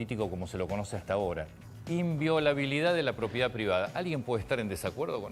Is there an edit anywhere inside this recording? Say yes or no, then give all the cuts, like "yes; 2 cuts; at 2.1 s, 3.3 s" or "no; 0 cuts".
yes; 1 cut; at 1.5 s